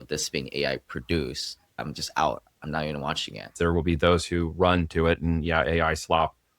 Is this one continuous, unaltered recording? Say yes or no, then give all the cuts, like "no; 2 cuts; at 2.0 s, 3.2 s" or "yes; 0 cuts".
no; 2 cuts; at 2.0 s, 3.5 s